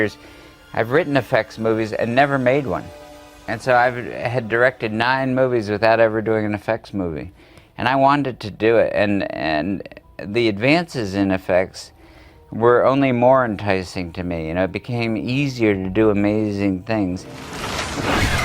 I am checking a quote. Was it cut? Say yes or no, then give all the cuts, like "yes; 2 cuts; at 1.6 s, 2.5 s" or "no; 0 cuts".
yes; 1 cut; at 7.0 s